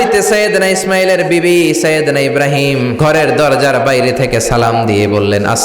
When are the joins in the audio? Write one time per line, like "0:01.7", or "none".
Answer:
0:03.0